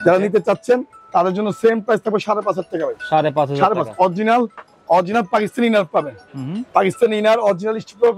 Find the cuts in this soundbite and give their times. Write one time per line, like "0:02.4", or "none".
none